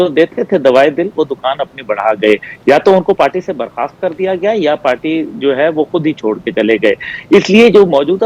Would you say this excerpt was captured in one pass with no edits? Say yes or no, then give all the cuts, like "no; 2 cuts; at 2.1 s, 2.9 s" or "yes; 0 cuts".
yes; 0 cuts